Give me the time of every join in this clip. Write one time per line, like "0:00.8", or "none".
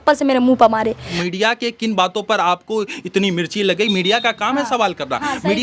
0:01.1